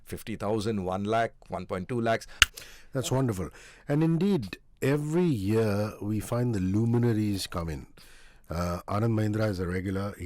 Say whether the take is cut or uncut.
cut